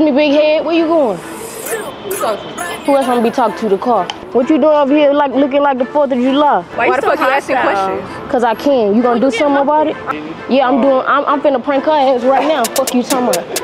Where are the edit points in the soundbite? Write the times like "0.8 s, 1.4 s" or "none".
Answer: 4.2 s, 6.7 s, 10.0 s